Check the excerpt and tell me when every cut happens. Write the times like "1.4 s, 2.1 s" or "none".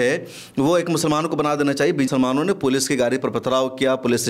2.1 s

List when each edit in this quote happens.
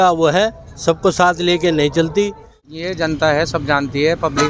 2.7 s

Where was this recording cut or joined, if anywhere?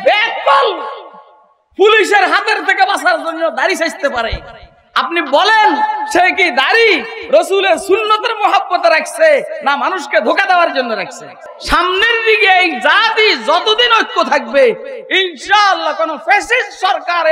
11.5 s

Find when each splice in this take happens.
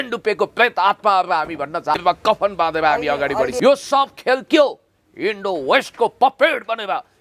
2.0 s, 3.5 s

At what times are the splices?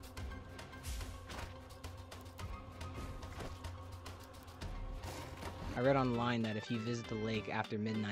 5.7 s

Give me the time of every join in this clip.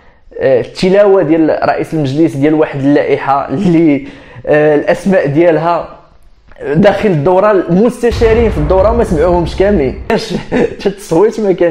10.1 s

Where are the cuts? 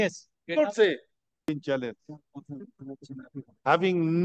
1.5 s

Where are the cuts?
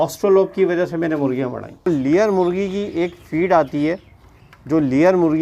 1.9 s

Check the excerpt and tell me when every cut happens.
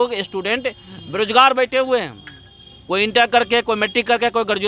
none

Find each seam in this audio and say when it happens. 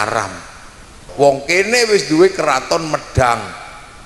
1.0 s

